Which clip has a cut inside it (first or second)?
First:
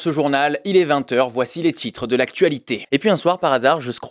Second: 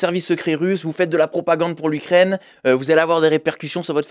first